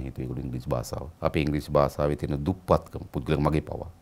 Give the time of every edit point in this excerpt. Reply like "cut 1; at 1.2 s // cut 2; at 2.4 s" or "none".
cut 1; at 1.1 s